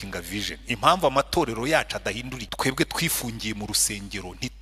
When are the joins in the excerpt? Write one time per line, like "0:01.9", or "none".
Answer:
0:02.4